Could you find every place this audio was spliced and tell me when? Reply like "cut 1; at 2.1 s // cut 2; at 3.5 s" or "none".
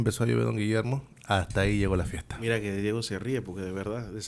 none